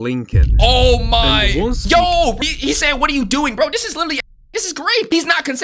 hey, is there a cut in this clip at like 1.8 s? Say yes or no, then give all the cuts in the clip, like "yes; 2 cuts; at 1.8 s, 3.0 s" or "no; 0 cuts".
yes; 1 cut; at 1.8 s